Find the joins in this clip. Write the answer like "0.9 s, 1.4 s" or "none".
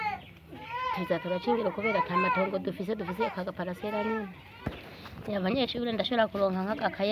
4.6 s